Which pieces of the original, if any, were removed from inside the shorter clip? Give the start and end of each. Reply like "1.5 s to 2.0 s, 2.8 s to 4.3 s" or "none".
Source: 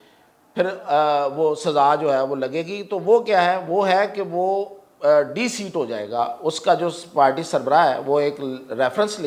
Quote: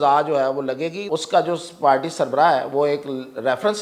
2.8 s to 6.4 s